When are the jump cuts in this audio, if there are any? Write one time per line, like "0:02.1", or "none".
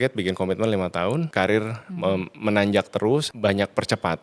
0:01.3
0:03.3